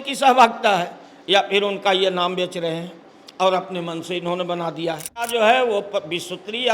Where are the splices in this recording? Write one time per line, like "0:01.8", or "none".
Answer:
0:05.3